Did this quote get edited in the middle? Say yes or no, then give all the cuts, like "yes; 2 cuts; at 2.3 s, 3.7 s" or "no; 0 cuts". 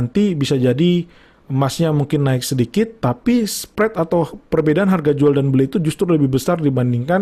no; 0 cuts